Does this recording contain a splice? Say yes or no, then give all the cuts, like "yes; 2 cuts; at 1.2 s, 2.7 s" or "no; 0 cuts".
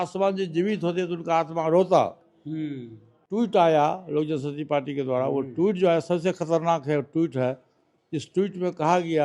yes; 1 cut; at 3.2 s